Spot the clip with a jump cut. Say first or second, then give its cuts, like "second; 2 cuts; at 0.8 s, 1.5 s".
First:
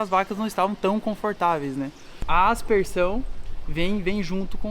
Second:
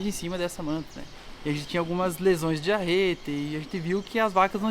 first; 1 cut; at 2.2 s